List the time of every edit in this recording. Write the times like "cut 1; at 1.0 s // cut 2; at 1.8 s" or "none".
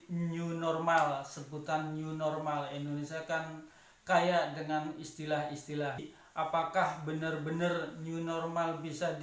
cut 1; at 6.1 s